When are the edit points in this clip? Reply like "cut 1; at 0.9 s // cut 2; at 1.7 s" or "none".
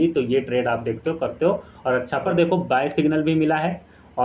cut 1; at 2.3 s